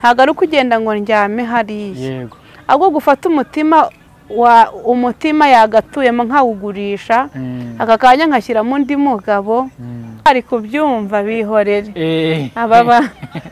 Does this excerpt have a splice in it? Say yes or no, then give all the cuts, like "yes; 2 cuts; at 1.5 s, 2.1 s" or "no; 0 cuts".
yes; 1 cut; at 10.3 s